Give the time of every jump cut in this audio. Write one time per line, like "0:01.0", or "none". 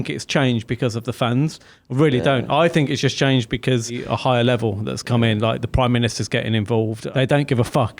0:04.0
0:07.0